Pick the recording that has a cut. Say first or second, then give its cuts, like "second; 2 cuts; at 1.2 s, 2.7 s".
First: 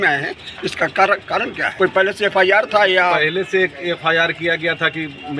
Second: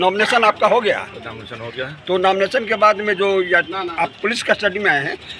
first; 1 cut; at 1.6 s